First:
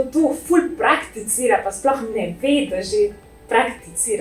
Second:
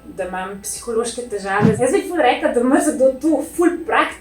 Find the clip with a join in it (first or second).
second